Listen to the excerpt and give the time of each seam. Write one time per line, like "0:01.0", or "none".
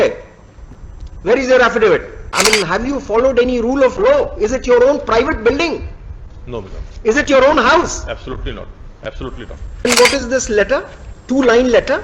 0:02.3
0:09.9